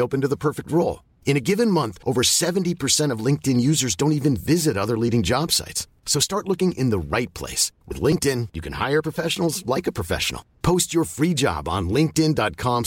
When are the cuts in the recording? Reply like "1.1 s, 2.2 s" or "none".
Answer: none